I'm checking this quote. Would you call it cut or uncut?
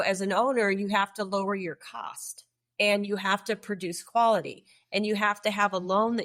uncut